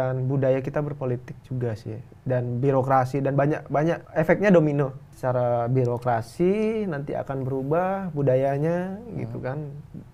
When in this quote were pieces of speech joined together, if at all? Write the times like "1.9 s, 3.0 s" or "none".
4.0 s, 5.1 s